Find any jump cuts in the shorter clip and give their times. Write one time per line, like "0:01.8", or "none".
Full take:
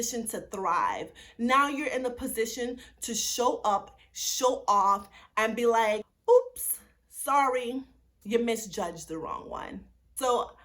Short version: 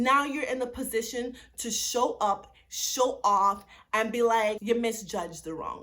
0:04.6